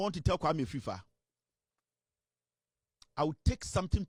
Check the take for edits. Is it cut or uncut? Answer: uncut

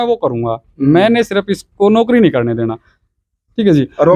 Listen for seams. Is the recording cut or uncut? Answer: uncut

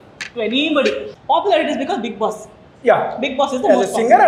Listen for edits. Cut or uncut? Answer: cut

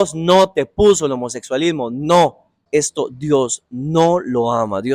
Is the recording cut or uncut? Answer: cut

